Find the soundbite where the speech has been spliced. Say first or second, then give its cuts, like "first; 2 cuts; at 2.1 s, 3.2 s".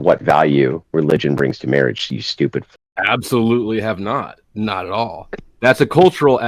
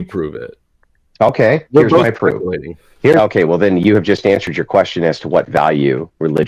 second; 1 cut; at 3.2 s